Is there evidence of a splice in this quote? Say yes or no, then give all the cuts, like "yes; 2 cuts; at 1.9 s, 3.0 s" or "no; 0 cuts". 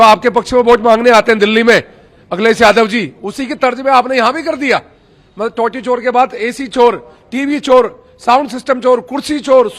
no; 0 cuts